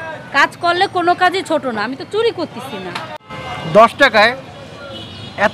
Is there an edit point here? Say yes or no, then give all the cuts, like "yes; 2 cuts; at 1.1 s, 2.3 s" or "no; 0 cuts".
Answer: yes; 1 cut; at 3.2 s